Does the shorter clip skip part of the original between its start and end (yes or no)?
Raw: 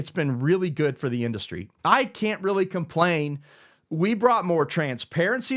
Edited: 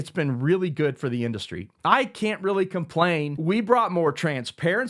yes